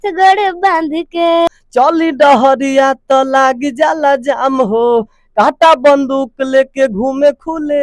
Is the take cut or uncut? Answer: cut